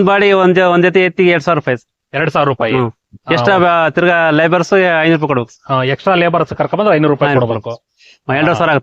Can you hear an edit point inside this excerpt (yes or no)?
no